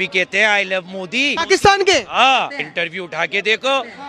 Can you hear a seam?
yes; 2 cuts; at 1.3 s, 2.6 s

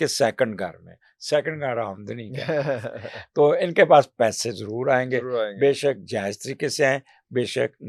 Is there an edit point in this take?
no; 0 cuts

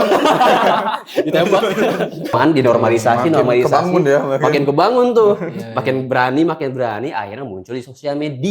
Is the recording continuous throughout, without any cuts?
no; 1 cut; at 2.3 s

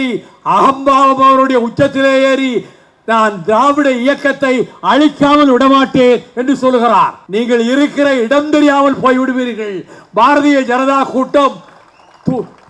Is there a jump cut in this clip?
yes; 1 cut; at 7.2 s

